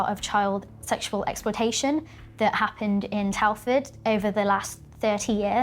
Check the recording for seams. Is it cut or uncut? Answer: uncut